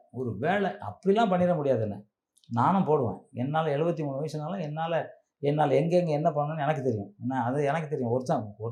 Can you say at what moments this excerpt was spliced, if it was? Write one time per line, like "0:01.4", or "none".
none